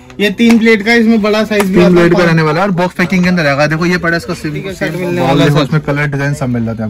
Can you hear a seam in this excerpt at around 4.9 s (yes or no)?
yes